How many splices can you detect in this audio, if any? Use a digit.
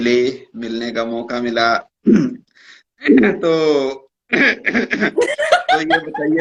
0